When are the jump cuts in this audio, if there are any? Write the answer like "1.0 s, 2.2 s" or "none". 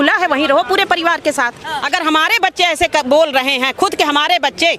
1.7 s